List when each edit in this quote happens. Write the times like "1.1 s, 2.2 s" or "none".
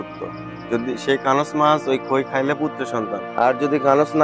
3.2 s